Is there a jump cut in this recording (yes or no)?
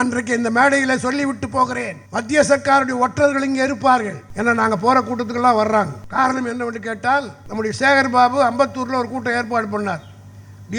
yes